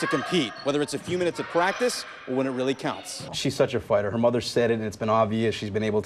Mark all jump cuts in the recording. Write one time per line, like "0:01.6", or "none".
0:03.3